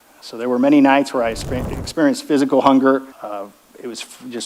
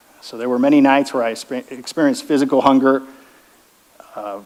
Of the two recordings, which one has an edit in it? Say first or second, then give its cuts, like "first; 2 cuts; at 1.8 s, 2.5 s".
first; 1 cut; at 3.1 s